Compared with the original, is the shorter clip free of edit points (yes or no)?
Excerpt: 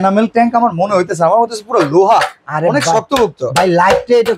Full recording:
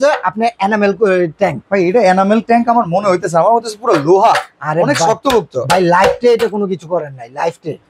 yes